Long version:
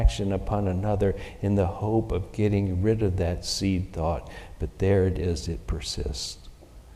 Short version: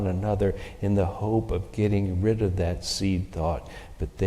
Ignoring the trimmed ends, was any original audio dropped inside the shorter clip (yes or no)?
no